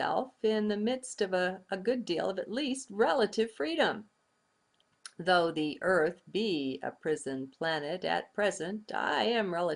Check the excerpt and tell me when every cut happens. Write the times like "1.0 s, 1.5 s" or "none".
5.8 s